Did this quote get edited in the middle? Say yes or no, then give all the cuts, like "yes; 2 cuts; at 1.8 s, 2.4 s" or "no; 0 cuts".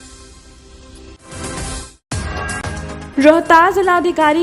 yes; 1 cut; at 1.1 s